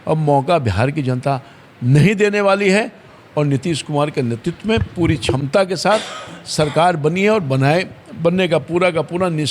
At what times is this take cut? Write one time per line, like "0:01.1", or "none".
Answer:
none